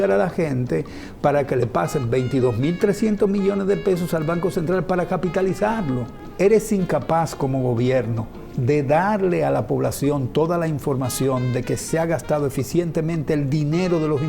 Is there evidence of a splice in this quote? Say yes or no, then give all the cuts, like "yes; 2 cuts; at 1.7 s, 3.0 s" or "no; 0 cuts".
yes; 1 cut; at 6.2 s